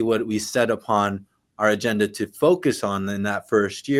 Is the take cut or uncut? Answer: uncut